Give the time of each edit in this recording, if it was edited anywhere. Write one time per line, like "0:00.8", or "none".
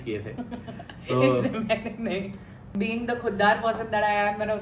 0:02.6